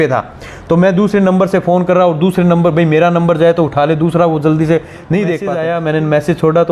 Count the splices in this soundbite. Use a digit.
1